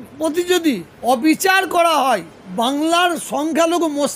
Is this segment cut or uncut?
cut